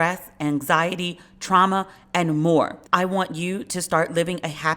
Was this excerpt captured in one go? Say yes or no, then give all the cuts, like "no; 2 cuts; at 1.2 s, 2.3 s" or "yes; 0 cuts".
no; 1 cut; at 2.8 s